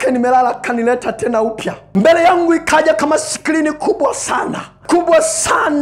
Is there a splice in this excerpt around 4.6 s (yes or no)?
no